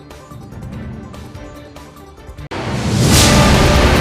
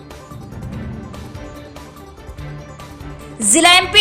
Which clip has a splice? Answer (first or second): first